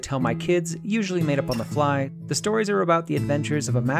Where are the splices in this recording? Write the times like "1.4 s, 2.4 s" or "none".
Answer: 2.2 s